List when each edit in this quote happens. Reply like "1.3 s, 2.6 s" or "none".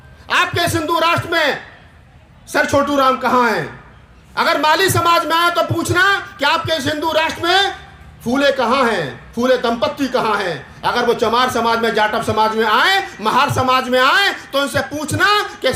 none